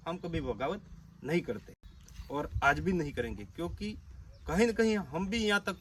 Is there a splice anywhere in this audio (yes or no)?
no